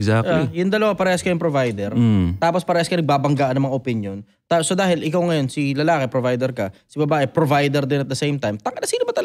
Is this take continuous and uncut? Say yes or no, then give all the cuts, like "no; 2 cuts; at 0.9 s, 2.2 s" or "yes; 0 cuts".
yes; 0 cuts